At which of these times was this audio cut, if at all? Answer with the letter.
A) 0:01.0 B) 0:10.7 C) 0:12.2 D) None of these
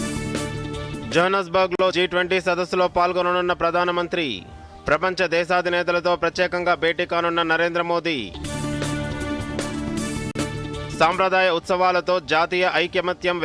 A